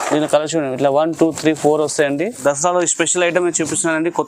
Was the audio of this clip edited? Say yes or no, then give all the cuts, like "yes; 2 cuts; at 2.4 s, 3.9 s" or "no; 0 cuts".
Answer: yes; 1 cut; at 2.4 s